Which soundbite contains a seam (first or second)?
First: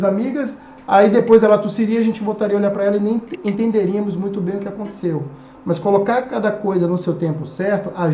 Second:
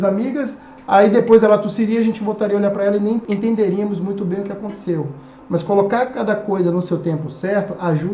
second